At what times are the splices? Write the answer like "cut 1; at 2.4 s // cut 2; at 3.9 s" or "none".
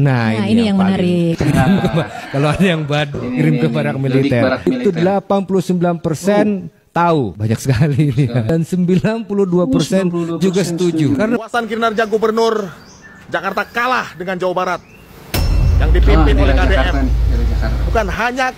cut 1; at 11.4 s